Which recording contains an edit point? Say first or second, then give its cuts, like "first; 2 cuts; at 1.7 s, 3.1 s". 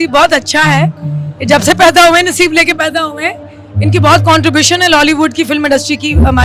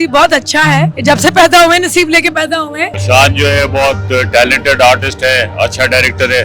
second; 2 cuts; at 0.9 s, 2.9 s